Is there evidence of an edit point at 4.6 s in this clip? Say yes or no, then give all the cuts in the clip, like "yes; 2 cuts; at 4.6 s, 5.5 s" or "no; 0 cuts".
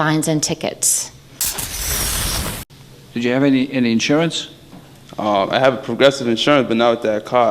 no; 2 cuts; at 1.3 s, 2.7 s